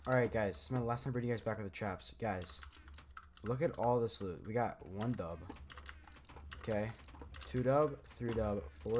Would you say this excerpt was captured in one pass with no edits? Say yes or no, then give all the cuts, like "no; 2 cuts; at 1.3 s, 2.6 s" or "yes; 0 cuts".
yes; 0 cuts